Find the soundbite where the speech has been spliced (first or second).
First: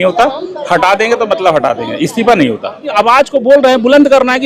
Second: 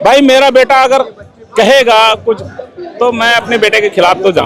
first